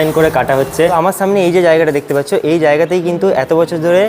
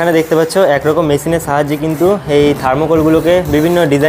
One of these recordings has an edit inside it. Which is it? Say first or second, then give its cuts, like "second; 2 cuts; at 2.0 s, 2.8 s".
first; 1 cut; at 0.9 s